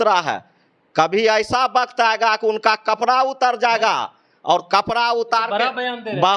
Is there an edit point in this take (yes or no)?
no